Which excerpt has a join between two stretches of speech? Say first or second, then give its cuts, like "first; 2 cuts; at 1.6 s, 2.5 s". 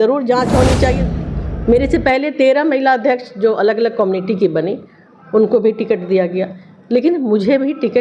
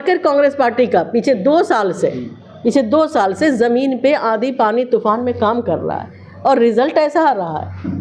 first; 1 cut; at 0.9 s